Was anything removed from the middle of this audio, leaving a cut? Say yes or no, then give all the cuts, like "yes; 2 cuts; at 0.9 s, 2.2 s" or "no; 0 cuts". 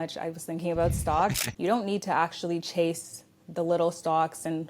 yes; 1 cut; at 1.5 s